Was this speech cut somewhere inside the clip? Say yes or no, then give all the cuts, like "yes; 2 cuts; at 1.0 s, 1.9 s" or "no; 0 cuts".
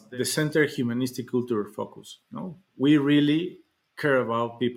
no; 0 cuts